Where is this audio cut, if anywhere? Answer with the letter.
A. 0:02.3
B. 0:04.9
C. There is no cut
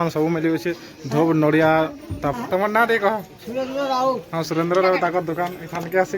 A